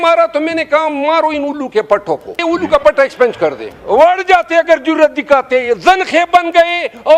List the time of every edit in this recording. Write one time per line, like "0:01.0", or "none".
0:02.4
0:03.7